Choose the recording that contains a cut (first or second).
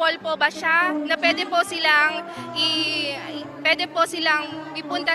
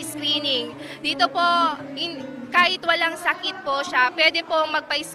second